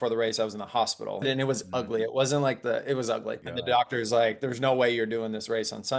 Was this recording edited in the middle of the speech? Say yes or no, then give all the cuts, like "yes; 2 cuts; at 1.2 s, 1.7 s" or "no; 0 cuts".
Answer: yes; 2 cuts; at 1.2 s, 3.5 s